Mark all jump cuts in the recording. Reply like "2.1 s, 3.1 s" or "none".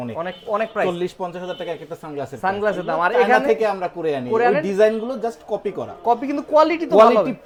none